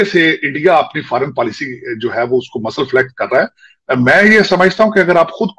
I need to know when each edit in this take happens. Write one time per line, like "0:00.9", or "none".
none